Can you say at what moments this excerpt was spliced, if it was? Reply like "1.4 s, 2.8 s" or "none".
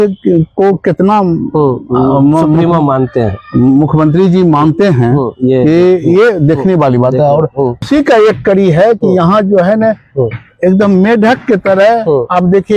7.8 s